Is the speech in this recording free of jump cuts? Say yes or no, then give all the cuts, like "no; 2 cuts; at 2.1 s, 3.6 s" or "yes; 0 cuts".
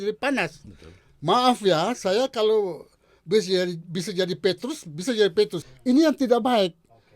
no; 1 cut; at 5.7 s